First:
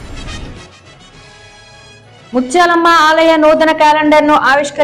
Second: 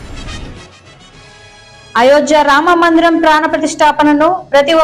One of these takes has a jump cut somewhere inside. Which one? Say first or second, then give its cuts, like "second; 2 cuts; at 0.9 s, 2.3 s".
second; 1 cut; at 1.8 s